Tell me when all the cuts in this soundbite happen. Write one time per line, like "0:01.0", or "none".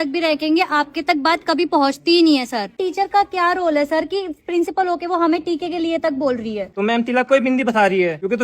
0:02.7
0:06.7